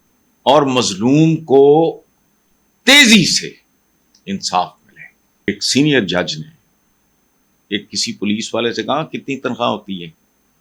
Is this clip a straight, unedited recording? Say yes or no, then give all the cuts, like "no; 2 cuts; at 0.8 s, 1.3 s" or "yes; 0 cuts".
no; 1 cut; at 5.5 s